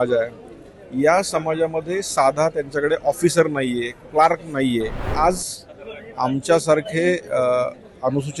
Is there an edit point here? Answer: yes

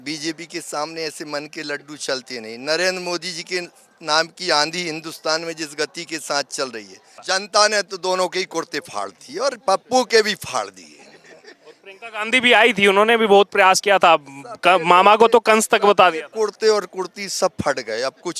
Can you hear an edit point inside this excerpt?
yes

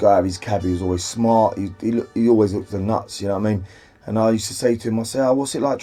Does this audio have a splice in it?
no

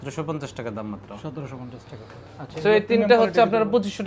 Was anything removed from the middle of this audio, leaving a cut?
no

